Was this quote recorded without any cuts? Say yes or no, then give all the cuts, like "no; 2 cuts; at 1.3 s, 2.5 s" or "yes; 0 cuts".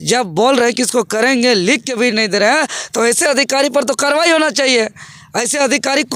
yes; 0 cuts